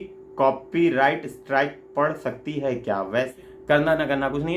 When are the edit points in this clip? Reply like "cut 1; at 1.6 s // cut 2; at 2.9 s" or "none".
cut 1; at 3.3 s